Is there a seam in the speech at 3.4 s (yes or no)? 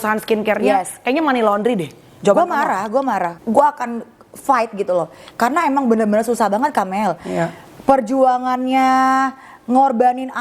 yes